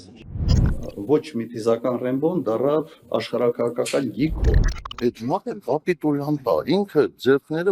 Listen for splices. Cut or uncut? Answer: uncut